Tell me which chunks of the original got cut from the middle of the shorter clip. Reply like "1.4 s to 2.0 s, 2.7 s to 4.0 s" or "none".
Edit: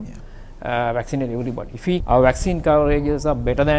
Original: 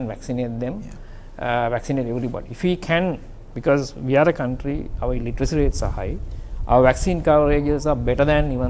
2.8 s to 6.6 s

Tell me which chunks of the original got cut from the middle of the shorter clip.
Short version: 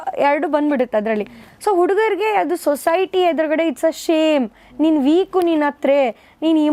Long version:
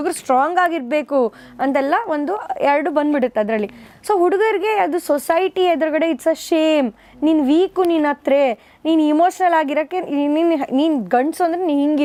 none

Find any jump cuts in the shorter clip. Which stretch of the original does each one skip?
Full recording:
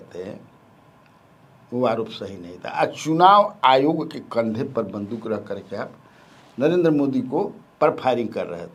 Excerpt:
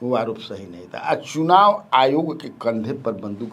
none

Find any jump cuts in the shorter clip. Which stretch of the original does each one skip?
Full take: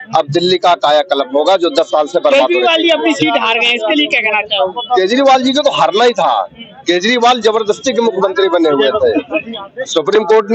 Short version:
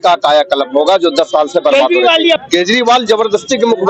3.0 s to 6.8 s

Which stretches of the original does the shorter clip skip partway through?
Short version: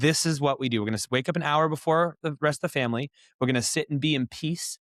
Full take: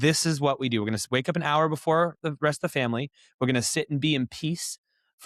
none

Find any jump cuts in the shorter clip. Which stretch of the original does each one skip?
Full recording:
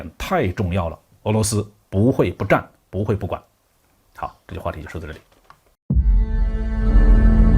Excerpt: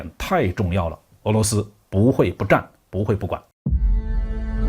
3.5 s to 5.7 s

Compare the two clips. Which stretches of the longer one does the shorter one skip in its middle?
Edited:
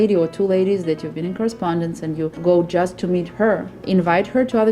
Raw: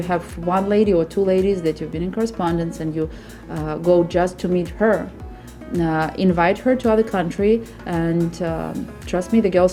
3.1 s to 3.8 s, 5.2 s to 6.1 s

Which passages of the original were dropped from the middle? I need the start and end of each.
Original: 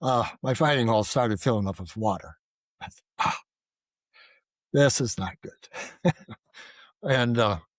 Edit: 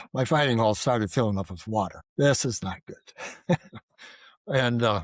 2.3 s to 4.6 s

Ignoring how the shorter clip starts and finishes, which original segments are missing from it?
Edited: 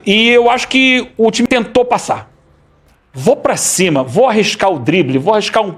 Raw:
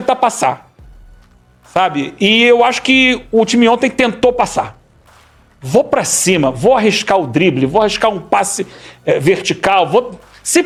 3.6 s to 3.9 s

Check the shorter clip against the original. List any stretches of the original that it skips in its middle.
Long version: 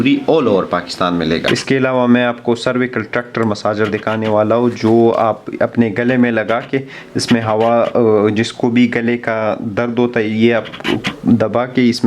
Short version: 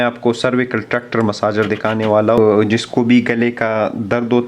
4.6 s to 8.0 s

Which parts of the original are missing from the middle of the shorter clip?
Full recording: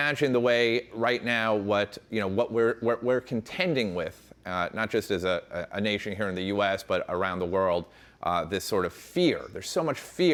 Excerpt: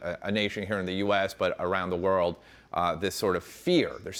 none

